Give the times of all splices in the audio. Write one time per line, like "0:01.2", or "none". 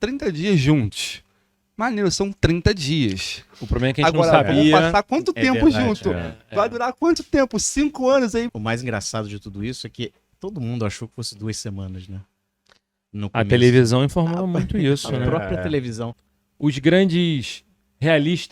0:08.5
0:16.2